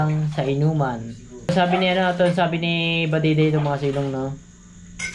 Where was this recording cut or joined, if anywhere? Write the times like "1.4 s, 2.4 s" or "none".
1.5 s